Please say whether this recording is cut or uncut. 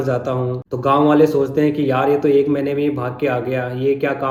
uncut